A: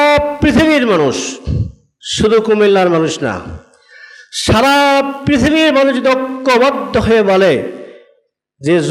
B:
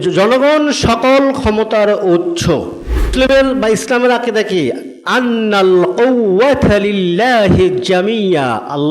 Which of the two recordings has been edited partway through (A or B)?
B